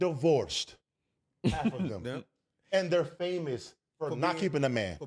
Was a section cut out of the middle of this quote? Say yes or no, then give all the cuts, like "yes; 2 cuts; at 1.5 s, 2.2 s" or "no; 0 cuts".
no; 0 cuts